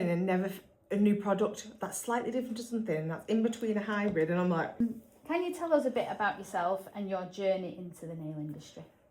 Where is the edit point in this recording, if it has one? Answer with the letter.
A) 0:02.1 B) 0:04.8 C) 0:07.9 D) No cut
B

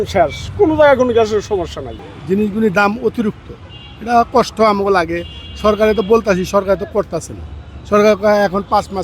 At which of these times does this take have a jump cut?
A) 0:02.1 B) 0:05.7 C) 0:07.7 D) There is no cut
A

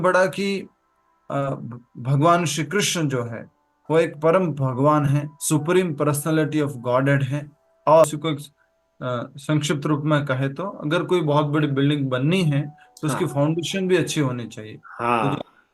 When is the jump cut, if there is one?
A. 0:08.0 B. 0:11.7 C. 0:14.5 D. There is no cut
A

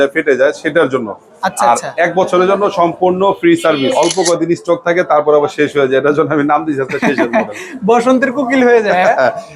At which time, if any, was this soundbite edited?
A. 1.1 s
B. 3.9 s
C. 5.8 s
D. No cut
B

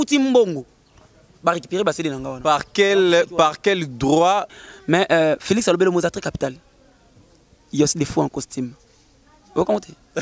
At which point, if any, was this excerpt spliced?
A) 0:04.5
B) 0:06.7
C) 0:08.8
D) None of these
A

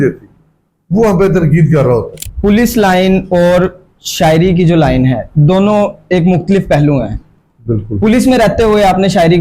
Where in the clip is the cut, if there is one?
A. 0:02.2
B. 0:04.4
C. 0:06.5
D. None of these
A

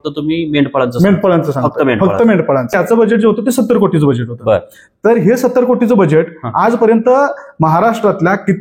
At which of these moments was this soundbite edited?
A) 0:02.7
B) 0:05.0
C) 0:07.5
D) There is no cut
A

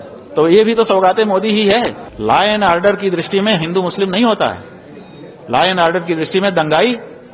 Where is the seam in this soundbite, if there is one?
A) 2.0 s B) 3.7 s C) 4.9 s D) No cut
A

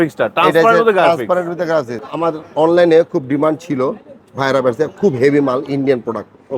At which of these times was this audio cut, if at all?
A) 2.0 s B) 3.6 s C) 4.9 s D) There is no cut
A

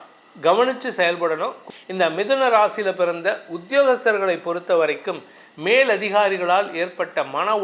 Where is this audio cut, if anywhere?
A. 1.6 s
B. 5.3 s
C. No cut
A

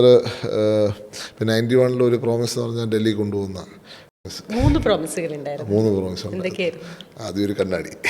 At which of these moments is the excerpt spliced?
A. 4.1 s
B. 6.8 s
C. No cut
A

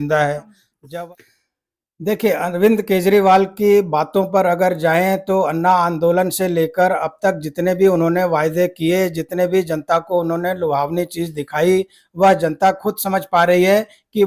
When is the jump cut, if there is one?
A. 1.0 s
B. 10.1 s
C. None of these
A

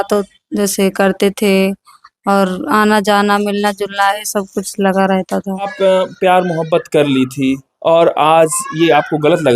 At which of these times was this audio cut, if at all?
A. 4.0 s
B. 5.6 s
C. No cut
B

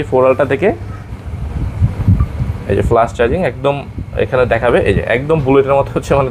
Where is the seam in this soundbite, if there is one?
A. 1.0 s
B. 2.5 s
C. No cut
A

